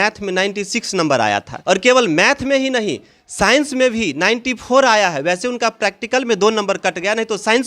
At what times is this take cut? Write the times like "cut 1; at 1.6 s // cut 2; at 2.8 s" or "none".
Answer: cut 1; at 1.5 s